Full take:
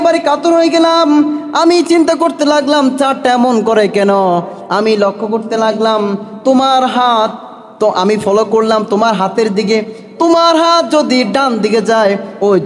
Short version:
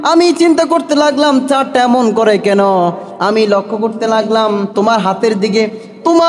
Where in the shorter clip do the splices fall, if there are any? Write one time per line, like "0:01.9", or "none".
0:04.7